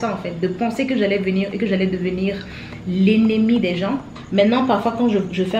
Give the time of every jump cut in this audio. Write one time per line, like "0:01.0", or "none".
0:04.2